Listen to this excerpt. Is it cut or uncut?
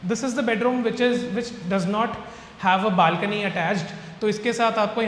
uncut